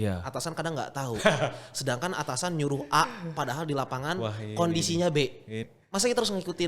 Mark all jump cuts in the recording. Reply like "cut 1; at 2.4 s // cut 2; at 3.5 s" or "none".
cut 1; at 5.7 s